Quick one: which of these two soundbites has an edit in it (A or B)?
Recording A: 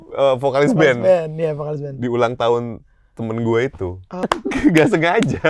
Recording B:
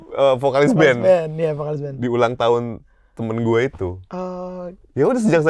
A